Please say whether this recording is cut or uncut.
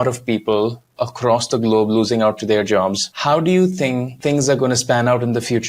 uncut